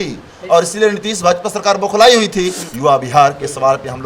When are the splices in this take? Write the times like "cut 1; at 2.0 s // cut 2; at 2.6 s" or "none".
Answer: cut 1; at 2.6 s